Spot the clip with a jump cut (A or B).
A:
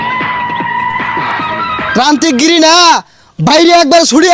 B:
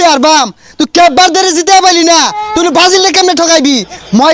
A